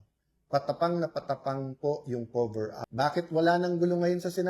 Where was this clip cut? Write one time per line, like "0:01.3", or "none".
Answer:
0:02.8